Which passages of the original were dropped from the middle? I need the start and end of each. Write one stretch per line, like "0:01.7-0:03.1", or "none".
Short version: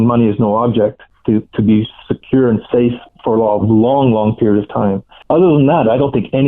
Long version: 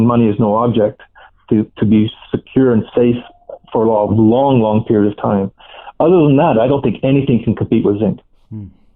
0:01.1-0:01.3
0:03.3-0:03.6
0:05.6-0:05.8

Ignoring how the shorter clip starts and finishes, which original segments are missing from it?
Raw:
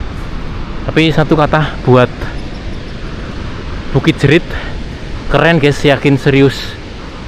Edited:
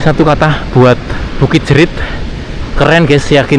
0:02.3-0:03.7

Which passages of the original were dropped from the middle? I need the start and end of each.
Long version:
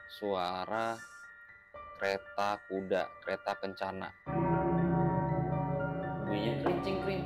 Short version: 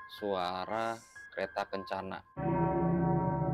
0:01.3-0:03.2

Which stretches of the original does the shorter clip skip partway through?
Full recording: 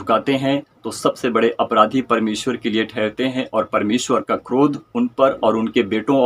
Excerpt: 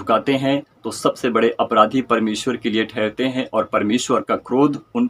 none

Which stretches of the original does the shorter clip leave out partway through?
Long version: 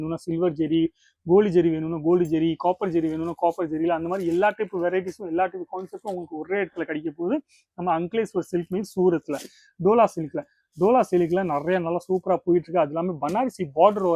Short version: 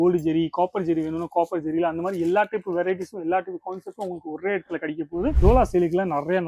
0:07.4-0:10.7

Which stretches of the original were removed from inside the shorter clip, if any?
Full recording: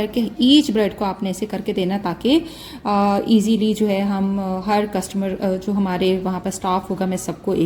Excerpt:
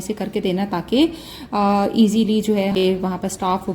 0:04.1-0:06.0

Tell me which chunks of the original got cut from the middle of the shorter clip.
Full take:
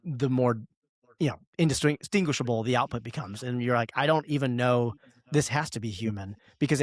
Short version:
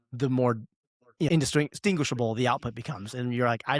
0:01.3-0:01.6

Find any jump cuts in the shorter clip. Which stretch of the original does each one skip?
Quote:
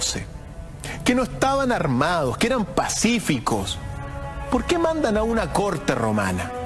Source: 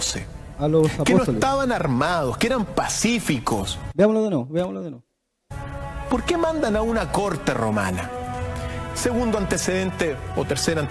0:03.8-0:05.4

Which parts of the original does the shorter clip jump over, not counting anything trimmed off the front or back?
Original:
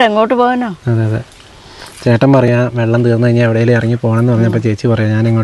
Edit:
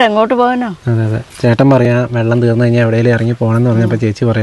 0:01.2-0:01.8

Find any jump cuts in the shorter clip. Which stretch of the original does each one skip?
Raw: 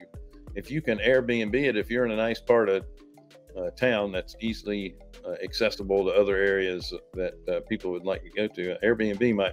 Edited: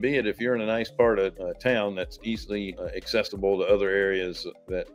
0:02.9-0:03.6
0:04.9-0:05.2

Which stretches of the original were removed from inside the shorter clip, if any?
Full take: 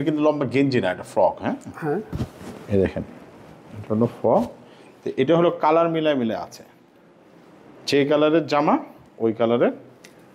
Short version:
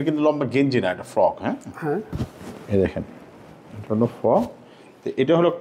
none

